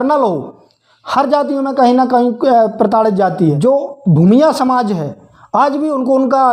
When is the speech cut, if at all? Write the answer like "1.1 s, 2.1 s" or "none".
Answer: 3.6 s